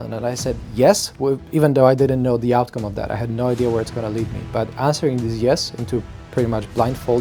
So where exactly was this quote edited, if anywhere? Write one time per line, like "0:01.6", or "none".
none